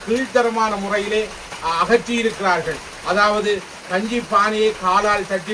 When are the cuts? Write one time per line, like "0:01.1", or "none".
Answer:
none